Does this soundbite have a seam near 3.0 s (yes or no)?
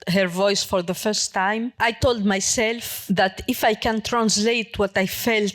no